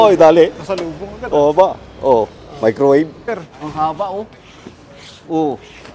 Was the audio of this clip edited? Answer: yes; 1 cut; at 3.2 s

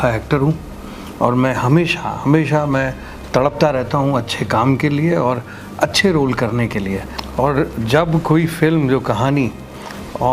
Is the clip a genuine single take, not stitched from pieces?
no; 1 cut; at 7.2 s

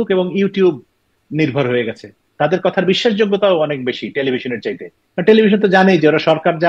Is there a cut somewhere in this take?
yes; 1 cut; at 2.2 s

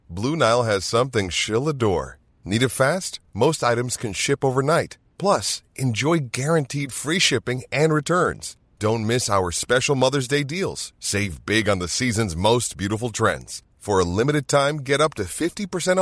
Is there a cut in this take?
no; 0 cuts

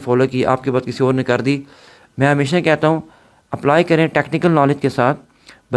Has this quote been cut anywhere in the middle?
no; 0 cuts

